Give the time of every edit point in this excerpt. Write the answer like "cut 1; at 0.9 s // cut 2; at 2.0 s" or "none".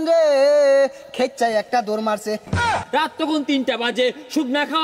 cut 1; at 2.8 s